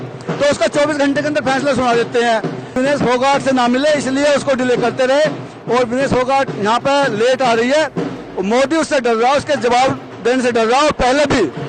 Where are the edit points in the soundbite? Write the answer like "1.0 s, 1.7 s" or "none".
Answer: 2.7 s